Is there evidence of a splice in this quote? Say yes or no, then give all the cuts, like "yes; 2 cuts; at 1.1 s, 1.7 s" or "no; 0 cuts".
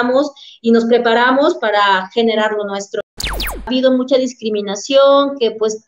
yes; 1 cut; at 3.3 s